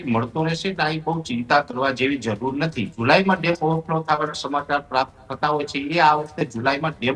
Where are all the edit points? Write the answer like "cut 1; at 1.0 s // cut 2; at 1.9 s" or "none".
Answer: cut 1; at 3.0 s